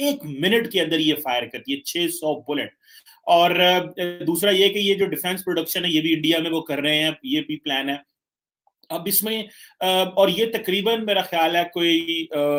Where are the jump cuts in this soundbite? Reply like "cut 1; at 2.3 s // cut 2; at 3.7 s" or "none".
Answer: none